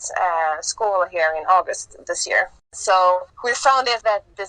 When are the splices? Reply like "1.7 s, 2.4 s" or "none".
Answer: 2.6 s, 3.5 s